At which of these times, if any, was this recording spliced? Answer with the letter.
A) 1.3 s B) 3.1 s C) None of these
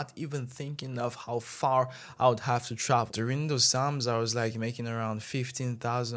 B